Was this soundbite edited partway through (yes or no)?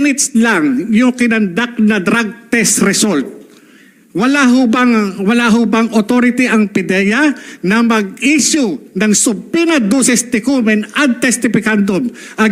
no